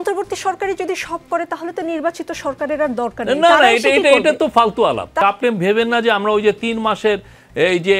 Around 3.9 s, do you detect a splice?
no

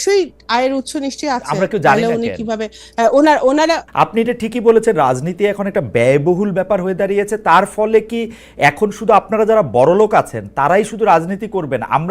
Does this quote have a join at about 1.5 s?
no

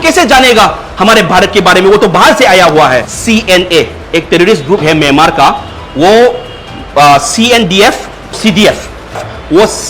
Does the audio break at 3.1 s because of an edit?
yes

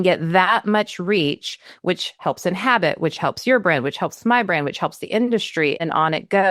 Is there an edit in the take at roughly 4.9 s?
no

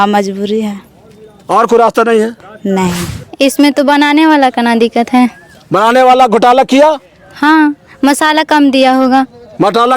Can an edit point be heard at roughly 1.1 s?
no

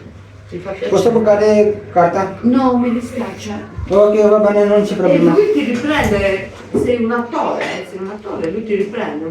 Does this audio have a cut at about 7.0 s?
yes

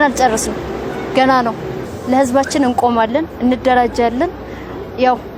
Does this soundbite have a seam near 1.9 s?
yes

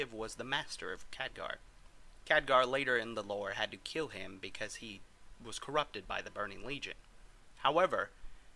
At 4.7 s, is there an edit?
yes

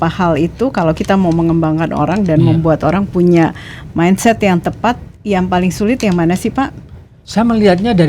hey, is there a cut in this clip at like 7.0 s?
no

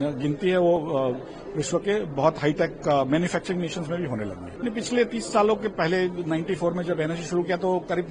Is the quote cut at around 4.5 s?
yes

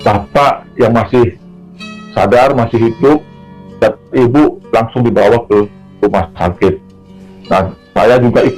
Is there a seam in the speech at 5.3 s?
no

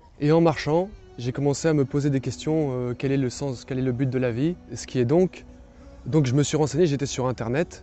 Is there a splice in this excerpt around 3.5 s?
no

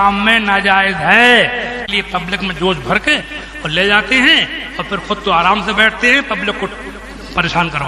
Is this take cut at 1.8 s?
yes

